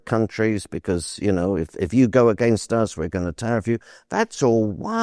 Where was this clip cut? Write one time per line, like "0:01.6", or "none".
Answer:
none

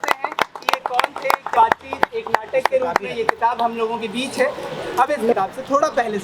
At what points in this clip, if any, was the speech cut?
0:01.5
0:05.3

